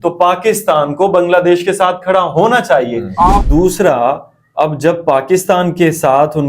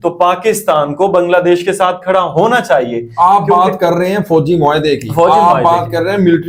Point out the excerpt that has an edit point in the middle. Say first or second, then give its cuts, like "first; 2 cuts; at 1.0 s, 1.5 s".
first; 1 cut; at 3.4 s